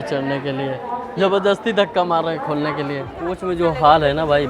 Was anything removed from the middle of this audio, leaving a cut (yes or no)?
yes